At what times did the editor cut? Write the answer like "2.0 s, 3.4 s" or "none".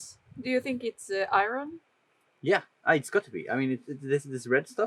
none